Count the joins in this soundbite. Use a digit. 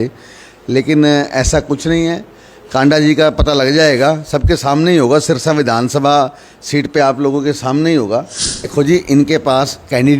1